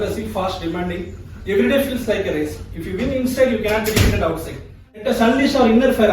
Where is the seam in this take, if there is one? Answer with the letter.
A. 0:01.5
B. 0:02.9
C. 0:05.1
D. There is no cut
C